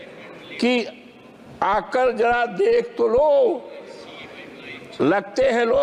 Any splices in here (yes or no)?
no